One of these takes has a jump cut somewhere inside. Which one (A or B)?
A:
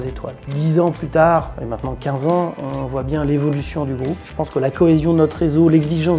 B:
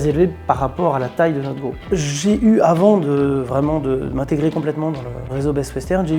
B